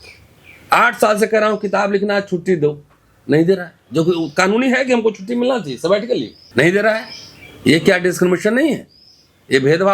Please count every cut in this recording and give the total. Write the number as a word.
one